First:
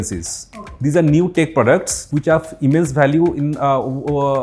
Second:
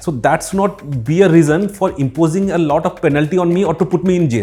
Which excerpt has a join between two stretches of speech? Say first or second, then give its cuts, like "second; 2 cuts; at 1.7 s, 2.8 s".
first; 1 cut; at 2.0 s